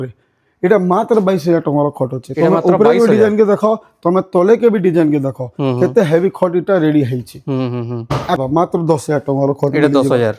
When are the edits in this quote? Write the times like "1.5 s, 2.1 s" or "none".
8.4 s

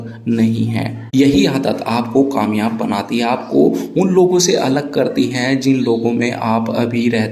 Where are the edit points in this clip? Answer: 1.0 s

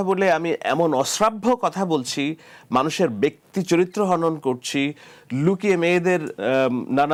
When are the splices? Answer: none

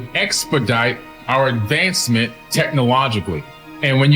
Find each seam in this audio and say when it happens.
2.4 s

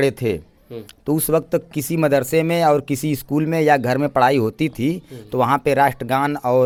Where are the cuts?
none

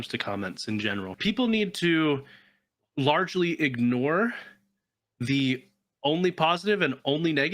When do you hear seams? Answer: 1.1 s

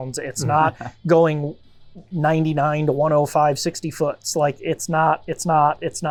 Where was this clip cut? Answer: none

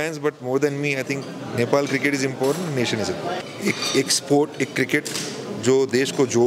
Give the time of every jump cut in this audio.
3.4 s

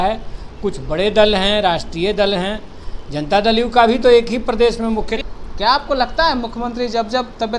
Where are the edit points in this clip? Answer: 5.2 s

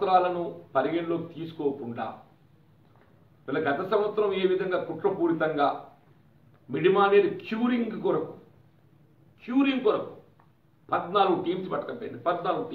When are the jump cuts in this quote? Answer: none

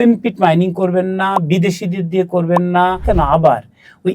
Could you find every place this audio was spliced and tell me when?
3.0 s

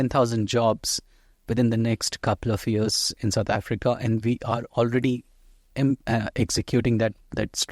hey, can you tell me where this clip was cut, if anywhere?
none

